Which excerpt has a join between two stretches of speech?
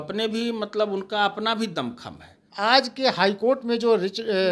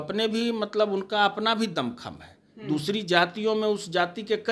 first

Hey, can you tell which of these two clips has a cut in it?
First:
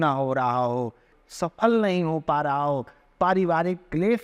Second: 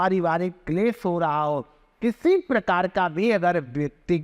first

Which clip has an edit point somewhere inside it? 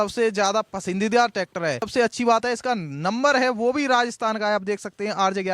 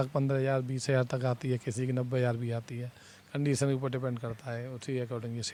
first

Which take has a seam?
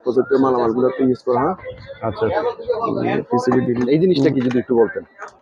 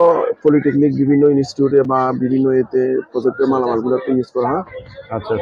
first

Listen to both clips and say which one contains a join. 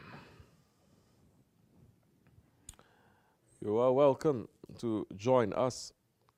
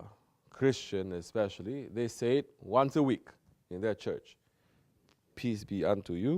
second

